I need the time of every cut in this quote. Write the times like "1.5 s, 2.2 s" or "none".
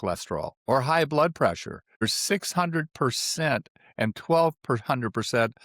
2.0 s